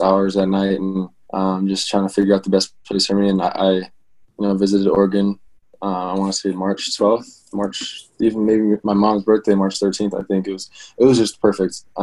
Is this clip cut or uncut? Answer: cut